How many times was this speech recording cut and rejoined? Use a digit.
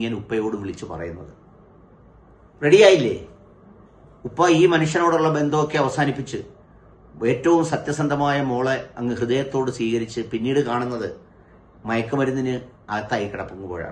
1